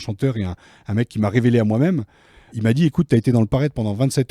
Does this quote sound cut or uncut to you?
cut